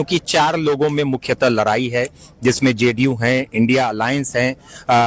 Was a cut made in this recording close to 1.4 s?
no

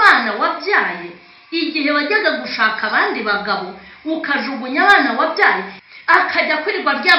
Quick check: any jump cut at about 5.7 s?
yes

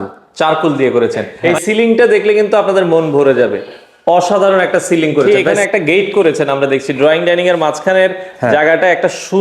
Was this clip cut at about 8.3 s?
no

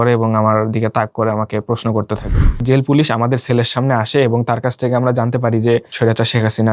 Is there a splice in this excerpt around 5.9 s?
yes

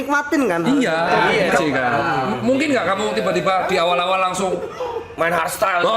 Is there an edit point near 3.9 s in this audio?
no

